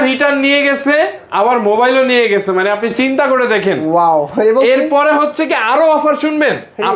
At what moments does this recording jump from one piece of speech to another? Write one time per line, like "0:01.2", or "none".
none